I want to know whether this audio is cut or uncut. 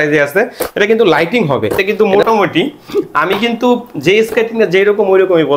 cut